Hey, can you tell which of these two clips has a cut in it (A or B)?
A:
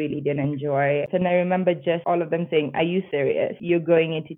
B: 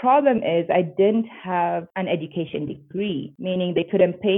A